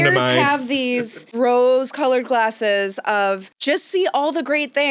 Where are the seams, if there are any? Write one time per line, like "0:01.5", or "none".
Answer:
0:01.3
0:03.5